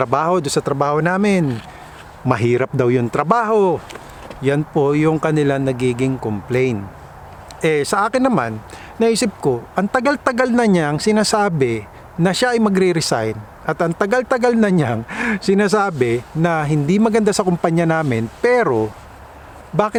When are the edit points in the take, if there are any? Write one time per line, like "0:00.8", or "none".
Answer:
none

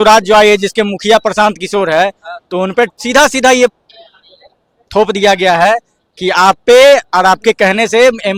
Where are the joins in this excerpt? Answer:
none

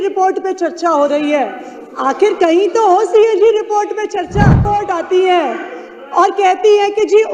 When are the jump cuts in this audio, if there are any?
0:04.6

